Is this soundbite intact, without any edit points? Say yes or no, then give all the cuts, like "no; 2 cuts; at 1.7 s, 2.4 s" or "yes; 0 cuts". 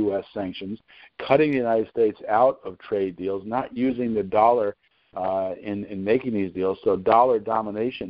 yes; 0 cuts